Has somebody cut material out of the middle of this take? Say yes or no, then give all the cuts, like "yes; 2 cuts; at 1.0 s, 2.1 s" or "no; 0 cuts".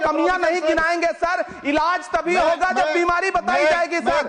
no; 0 cuts